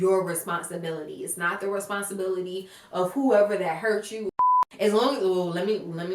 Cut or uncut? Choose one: cut